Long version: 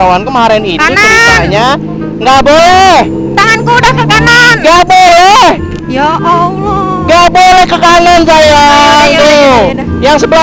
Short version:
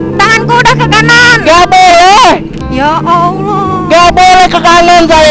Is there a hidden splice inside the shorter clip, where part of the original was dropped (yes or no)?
no